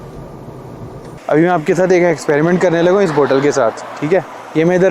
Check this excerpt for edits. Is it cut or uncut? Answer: cut